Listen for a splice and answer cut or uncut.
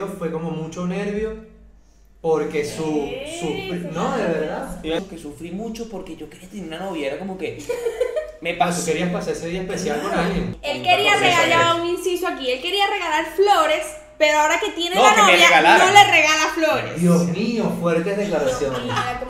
cut